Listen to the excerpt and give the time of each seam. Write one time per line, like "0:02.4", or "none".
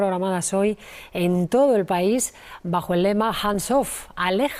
none